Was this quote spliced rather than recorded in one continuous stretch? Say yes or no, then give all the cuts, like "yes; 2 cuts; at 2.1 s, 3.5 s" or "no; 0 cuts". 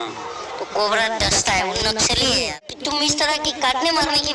yes; 1 cut; at 2.6 s